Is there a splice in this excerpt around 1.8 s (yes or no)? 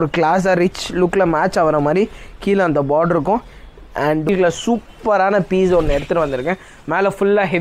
no